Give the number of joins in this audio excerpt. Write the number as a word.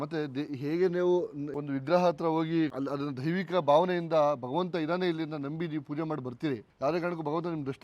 three